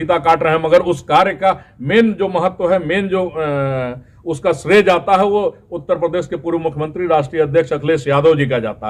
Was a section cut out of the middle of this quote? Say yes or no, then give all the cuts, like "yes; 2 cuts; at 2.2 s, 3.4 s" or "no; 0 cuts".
no; 0 cuts